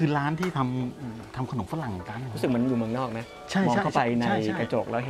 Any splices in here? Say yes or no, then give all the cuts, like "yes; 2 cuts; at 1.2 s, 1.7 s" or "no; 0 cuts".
no; 0 cuts